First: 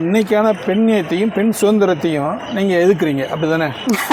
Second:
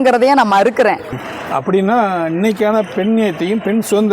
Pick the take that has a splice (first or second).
second